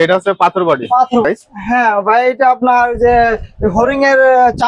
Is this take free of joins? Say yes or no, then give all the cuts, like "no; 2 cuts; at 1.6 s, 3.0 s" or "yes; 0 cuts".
no; 1 cut; at 1.2 s